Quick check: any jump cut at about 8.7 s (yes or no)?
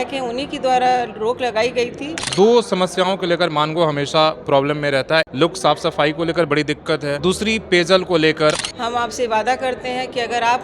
yes